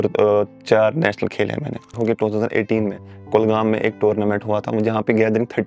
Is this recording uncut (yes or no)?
no